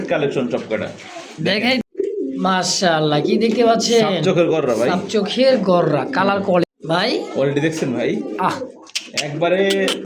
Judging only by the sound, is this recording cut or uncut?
cut